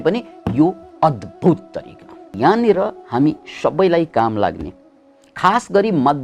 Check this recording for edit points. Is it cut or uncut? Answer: cut